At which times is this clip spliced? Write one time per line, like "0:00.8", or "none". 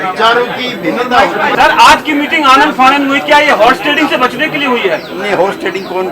0:01.5